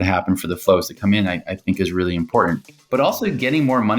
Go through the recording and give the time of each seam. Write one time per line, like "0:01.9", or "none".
0:02.7